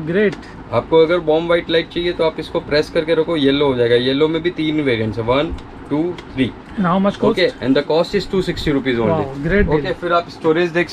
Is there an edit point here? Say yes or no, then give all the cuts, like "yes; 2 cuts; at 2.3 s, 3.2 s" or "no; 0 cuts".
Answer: no; 0 cuts